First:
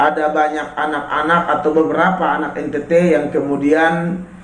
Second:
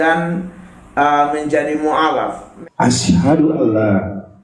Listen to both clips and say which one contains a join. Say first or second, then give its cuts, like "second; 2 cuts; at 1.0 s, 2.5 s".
second; 1 cut; at 2.6 s